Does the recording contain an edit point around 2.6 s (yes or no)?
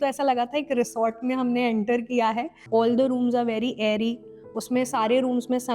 yes